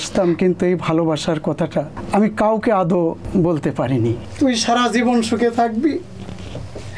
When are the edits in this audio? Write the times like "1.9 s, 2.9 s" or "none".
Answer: 2.0 s, 3.2 s, 4.2 s